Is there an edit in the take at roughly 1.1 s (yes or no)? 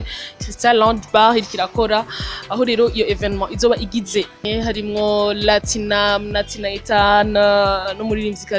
no